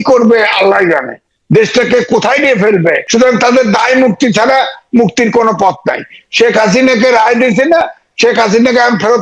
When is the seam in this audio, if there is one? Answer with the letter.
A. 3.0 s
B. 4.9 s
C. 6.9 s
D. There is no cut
A